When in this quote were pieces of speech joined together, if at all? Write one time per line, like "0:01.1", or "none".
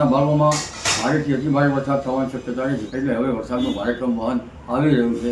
0:02.9